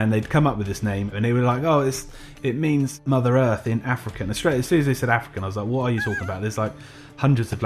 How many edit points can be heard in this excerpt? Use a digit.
2